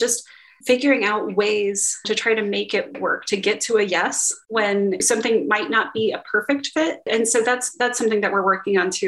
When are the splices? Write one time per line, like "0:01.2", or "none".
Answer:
0:02.0